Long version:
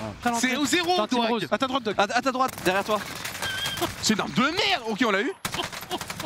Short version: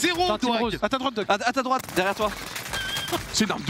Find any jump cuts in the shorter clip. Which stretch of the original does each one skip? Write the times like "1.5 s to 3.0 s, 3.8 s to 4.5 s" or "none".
none